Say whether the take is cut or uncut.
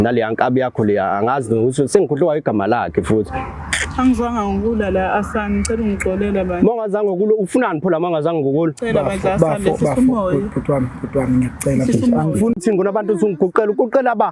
cut